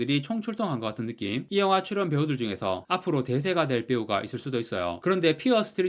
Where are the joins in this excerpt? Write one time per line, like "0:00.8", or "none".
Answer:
0:01.5
0:05.0